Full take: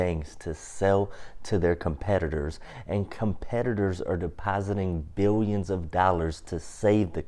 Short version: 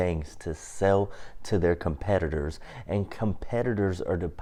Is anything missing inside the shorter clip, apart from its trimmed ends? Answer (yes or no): no